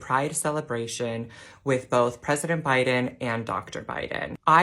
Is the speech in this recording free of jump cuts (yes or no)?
yes